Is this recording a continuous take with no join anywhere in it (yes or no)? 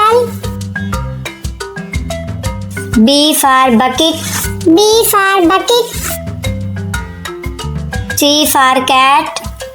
yes